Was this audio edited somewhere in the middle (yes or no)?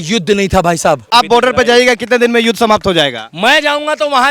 yes